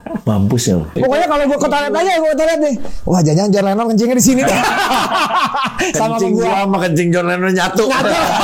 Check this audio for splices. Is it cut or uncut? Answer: cut